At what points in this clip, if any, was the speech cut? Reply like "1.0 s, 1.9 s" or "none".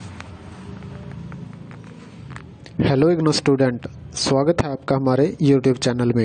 none